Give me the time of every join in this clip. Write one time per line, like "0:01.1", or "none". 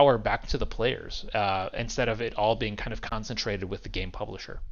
none